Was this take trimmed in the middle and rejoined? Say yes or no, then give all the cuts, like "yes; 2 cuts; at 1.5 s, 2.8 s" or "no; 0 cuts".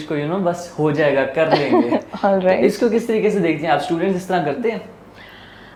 no; 0 cuts